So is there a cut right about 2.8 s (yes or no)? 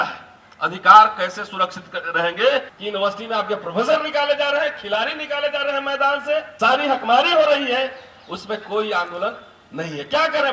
yes